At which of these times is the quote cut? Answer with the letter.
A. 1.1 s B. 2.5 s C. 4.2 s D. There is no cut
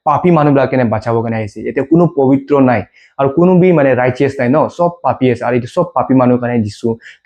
D